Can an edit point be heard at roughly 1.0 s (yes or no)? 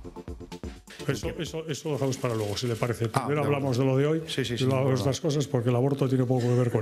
yes